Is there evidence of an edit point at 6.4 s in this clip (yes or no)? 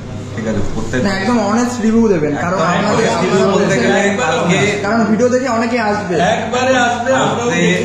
no